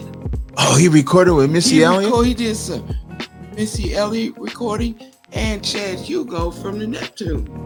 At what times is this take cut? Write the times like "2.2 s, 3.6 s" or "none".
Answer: none